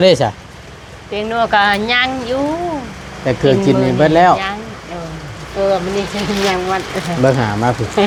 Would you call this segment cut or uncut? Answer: uncut